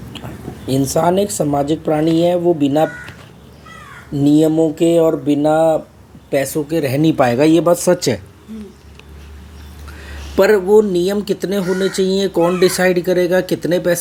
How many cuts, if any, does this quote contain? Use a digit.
0